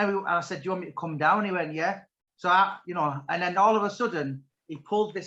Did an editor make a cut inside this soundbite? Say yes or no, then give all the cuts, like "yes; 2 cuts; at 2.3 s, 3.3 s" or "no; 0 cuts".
no; 0 cuts